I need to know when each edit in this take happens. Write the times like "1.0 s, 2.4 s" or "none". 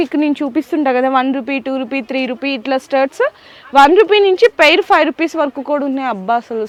none